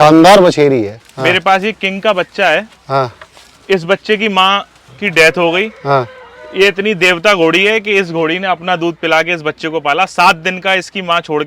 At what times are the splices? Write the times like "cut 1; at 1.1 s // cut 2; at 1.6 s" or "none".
cut 1; at 1.0 s